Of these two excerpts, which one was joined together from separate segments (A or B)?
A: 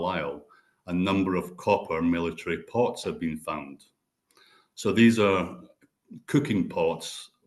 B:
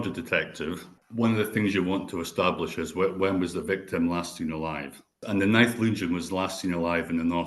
B